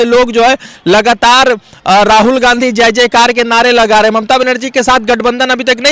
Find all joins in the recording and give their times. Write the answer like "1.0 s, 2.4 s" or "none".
none